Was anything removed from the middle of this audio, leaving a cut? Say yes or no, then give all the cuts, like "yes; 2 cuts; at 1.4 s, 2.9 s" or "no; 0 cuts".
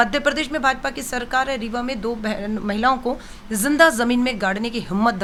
no; 0 cuts